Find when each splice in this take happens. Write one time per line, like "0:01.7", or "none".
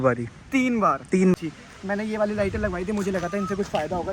0:01.4